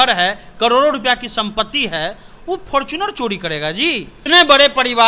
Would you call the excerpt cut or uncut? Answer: cut